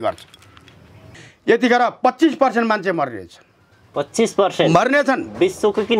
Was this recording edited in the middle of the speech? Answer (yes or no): yes